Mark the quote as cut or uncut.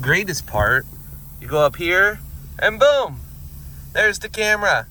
uncut